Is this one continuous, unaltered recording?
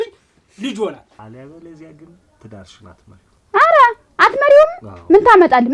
no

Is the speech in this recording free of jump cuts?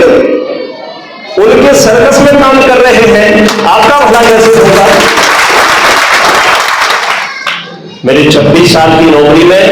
no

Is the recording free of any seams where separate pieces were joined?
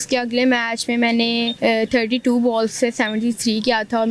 no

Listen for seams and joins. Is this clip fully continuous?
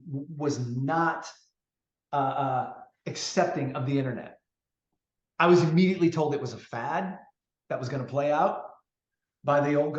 yes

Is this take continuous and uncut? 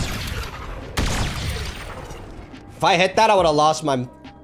yes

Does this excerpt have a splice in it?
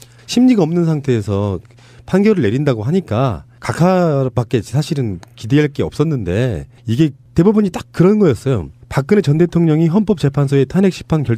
no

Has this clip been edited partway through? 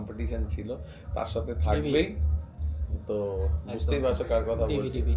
no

